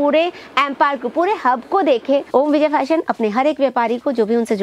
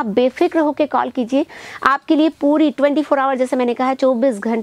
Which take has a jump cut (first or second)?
first